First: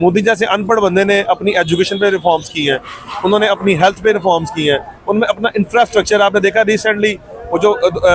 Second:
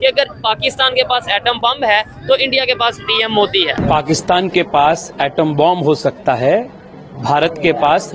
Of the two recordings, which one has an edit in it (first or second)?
second